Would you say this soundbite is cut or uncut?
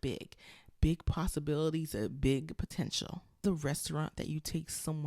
cut